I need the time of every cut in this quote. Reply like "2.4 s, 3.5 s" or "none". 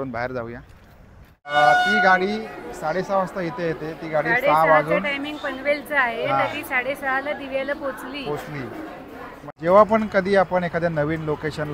1.5 s, 9.5 s

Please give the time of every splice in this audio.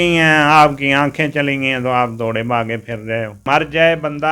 3.4 s

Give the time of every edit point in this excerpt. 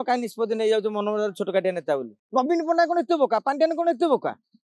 2.2 s

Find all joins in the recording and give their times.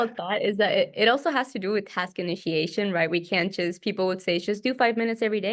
none

